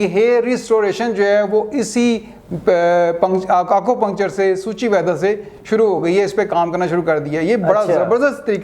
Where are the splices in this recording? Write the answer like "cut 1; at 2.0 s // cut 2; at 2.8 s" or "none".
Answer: none